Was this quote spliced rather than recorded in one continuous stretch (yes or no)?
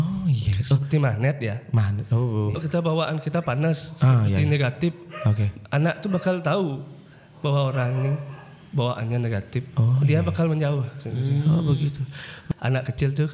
yes